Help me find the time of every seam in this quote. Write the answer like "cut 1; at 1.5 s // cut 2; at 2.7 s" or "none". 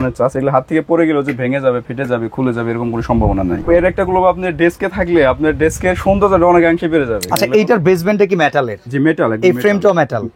cut 1; at 3.6 s // cut 2; at 7.2 s